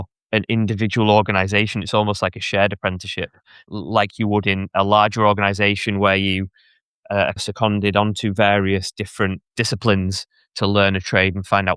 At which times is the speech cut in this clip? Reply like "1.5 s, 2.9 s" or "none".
3.7 s, 4.6 s, 7.4 s, 9.4 s

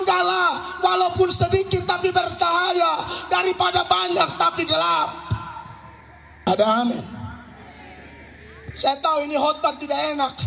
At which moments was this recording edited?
6.5 s, 8.7 s

